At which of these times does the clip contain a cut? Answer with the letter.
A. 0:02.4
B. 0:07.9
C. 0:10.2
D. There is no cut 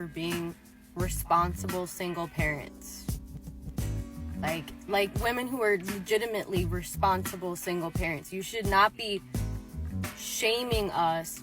B